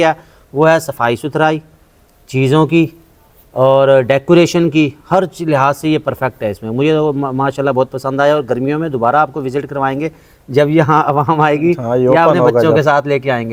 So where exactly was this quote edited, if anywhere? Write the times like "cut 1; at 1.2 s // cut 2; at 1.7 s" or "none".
none